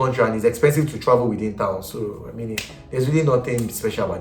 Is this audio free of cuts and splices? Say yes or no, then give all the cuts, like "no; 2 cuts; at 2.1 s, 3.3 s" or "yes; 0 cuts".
yes; 0 cuts